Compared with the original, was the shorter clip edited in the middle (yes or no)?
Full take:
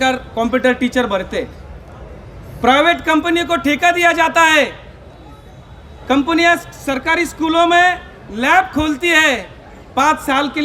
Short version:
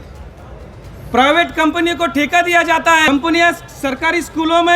yes